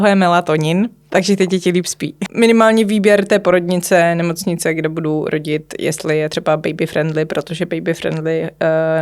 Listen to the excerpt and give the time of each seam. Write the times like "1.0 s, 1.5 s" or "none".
1.1 s, 2.3 s